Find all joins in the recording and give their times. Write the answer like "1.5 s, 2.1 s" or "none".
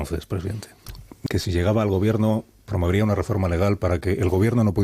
1.3 s